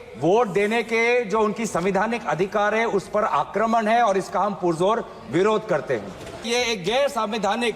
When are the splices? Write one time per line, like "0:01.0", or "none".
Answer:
0:06.5